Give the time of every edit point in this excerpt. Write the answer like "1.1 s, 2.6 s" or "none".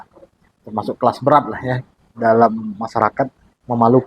1.9 s